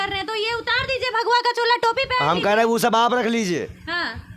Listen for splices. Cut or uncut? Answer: uncut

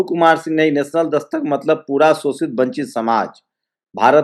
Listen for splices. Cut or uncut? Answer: uncut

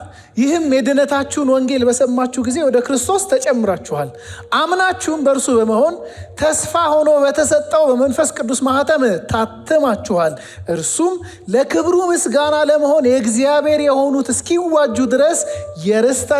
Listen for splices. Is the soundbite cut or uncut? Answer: uncut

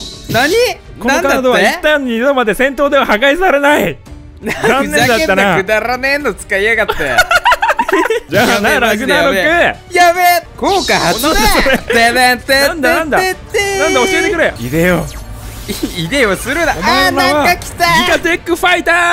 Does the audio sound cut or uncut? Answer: cut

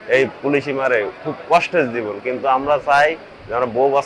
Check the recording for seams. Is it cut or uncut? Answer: uncut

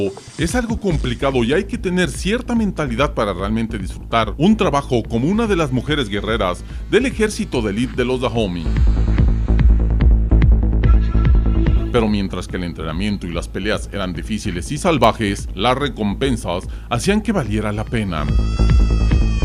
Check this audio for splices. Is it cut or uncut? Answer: uncut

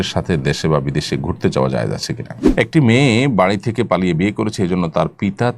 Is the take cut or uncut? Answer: cut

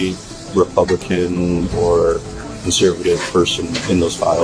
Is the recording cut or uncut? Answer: cut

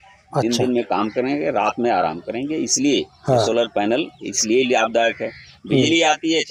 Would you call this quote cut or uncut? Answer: uncut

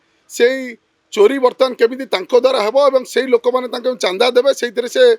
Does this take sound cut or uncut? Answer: uncut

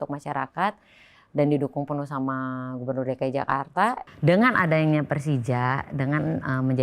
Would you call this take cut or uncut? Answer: cut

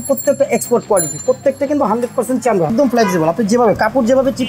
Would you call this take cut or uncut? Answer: cut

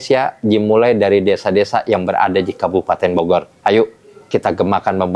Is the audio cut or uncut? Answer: uncut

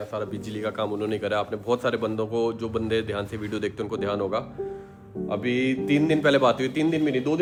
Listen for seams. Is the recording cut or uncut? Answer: uncut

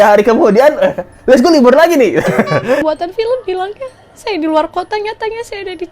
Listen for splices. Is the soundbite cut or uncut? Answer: cut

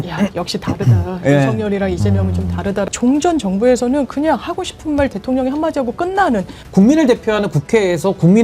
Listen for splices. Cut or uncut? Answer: cut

